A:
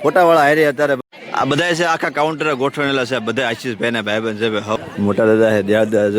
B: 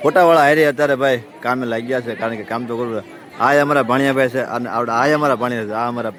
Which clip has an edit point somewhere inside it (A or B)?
A